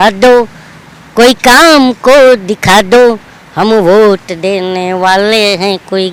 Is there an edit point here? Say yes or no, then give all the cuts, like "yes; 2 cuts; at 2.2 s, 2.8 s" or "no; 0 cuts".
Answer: no; 0 cuts